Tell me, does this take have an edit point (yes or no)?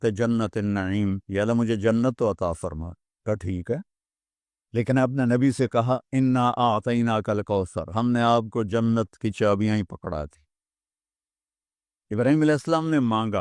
yes